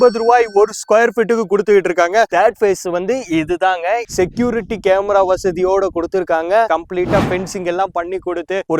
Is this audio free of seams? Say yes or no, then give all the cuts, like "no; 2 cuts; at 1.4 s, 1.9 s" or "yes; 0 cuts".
no; 2 cuts; at 2.3 s, 6.7 s